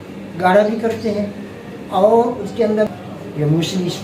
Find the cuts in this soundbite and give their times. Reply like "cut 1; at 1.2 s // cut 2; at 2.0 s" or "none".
cut 1; at 2.9 s